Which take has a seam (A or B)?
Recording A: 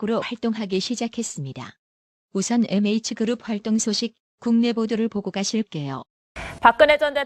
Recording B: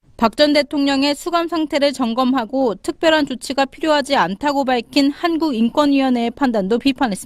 B